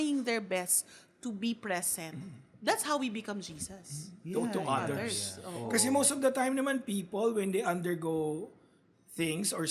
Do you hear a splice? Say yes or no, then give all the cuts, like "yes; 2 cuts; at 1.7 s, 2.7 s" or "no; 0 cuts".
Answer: no; 0 cuts